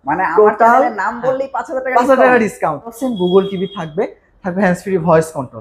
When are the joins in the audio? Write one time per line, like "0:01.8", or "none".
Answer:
0:03.0